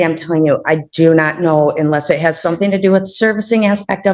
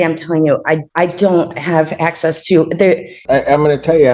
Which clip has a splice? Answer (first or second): second